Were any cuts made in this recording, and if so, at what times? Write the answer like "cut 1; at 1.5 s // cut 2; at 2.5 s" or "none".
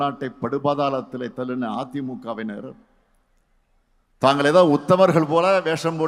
none